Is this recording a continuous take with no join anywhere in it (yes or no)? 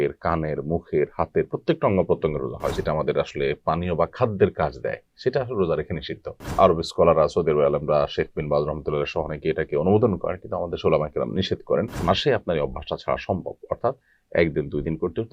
no